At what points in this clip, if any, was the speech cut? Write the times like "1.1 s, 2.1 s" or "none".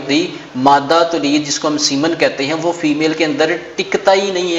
none

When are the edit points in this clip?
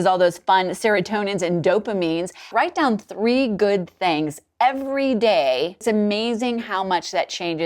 2.5 s, 5.8 s

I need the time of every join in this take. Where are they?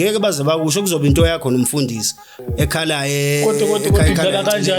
2.3 s

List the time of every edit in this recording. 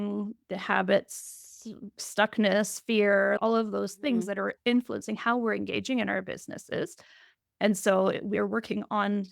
3.4 s, 4.5 s

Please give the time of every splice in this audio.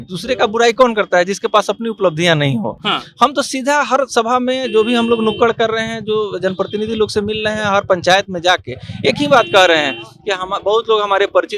none

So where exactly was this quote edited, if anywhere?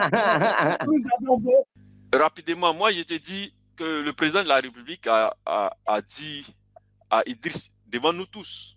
1.8 s

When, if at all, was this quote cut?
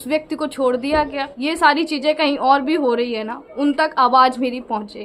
1.3 s

